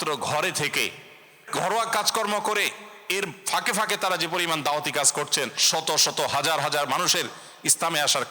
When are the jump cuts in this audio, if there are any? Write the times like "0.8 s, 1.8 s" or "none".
1.5 s